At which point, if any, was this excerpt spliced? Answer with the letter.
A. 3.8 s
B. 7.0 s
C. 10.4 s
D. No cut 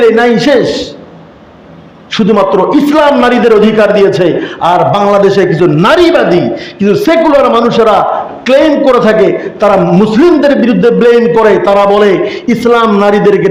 D